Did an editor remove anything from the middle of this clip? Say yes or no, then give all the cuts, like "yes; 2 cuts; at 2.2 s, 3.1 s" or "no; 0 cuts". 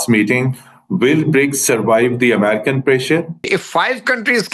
yes; 1 cut; at 3.5 s